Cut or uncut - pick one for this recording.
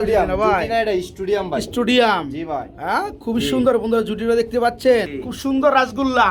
cut